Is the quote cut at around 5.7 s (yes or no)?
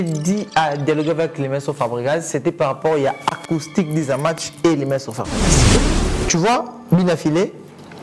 yes